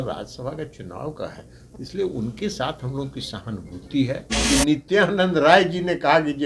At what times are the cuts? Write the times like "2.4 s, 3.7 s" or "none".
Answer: 4.3 s